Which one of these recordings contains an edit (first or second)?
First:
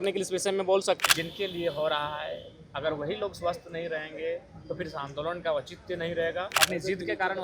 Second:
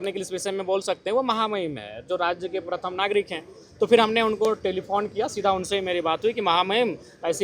first